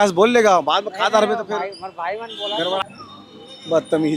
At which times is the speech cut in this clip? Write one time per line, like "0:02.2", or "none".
0:02.8